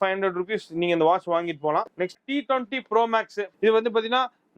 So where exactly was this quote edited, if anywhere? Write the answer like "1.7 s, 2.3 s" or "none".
2.1 s